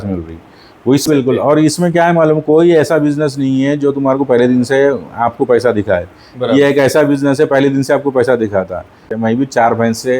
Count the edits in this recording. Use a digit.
2